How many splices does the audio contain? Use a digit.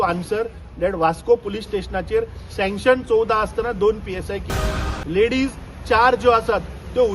1